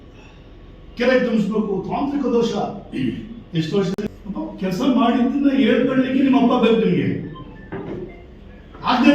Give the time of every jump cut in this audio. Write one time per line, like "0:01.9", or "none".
0:04.0

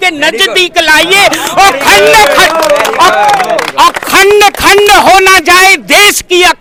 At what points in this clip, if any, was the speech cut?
none

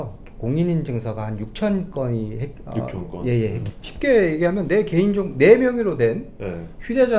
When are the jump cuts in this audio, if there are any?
0:03.7

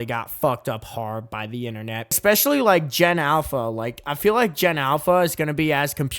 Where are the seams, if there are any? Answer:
0:02.1

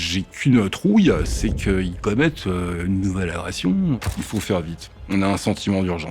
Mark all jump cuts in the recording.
0:04.2

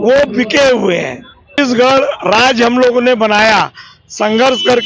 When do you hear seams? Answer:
0:01.7

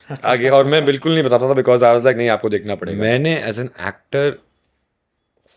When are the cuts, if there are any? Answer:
0:02.9

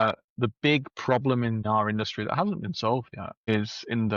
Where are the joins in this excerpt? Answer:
0:01.6
0:03.5

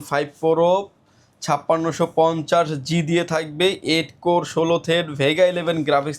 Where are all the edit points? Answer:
none

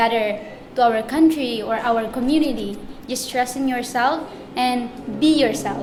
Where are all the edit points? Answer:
none

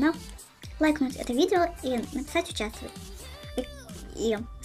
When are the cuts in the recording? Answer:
none

